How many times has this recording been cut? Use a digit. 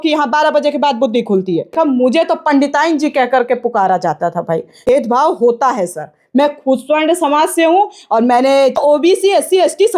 3